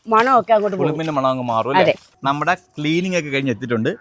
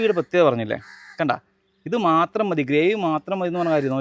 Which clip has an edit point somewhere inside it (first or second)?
first